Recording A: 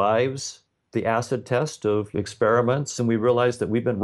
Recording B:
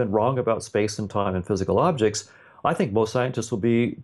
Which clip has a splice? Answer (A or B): A